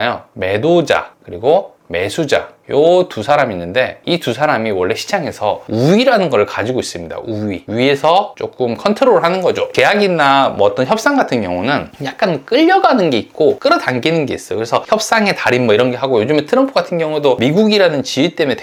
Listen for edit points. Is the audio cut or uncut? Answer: uncut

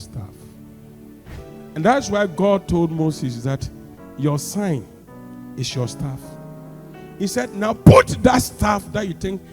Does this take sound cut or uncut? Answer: cut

